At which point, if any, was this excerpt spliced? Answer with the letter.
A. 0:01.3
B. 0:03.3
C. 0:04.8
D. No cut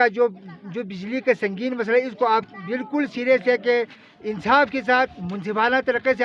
D